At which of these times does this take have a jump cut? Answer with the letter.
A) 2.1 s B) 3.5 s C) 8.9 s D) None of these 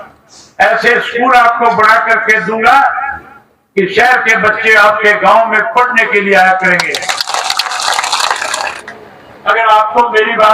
C